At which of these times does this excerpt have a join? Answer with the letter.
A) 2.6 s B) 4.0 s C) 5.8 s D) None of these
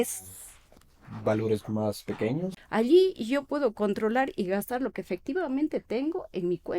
A